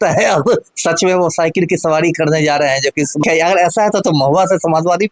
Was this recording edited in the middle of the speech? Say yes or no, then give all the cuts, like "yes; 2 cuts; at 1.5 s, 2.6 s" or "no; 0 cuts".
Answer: yes; 1 cut; at 3.2 s